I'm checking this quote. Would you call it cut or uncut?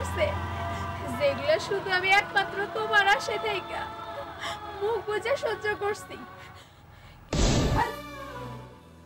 cut